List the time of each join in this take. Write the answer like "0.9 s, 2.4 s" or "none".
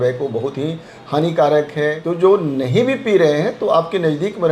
2.0 s

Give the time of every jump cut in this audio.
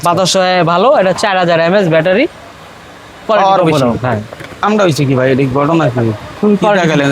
4.6 s

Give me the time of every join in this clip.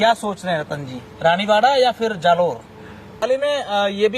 3.2 s

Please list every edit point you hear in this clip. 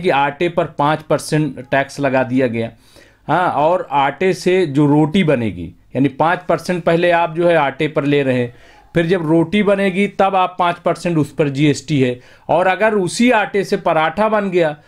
none

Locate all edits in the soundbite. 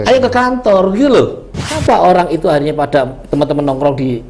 1.8 s

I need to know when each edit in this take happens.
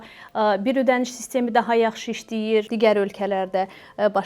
2.7 s

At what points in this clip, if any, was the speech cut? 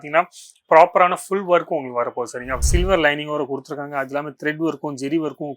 2.5 s

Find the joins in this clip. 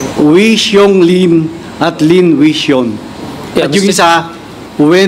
none

